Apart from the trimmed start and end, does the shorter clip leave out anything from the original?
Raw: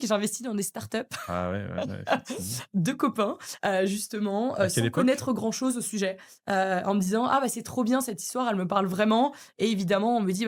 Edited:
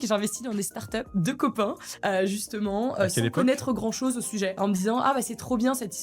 yes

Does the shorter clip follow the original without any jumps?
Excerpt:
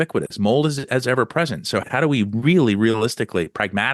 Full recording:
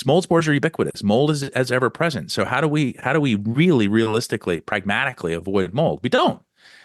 no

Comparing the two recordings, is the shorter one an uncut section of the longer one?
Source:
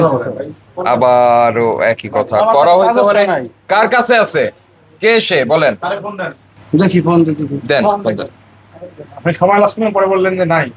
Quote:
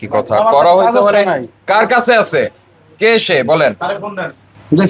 yes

